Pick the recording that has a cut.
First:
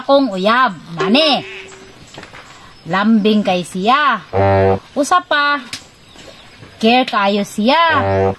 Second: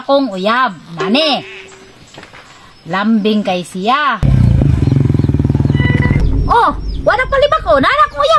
second; 2 cuts; at 4.3 s, 6.2 s

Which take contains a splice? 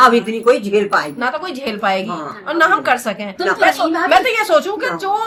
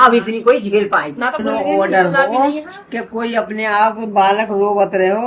second; 1 cut; at 1.4 s

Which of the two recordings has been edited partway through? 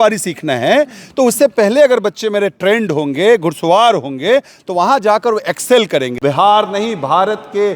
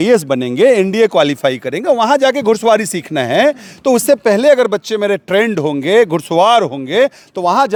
first; 1 cut; at 6.1 s

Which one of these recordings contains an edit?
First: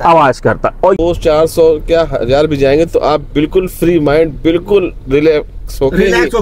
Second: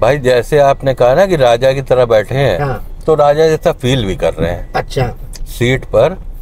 first; 1 cut; at 1.0 s

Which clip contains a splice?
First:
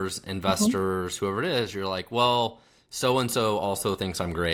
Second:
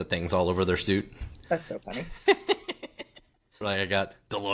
second; 1 cut; at 3.6 s

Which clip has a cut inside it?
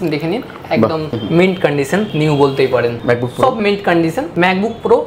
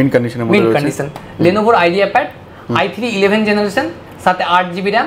first; 4 cuts; at 1.1 s, 2.1 s, 3.0 s, 4.2 s

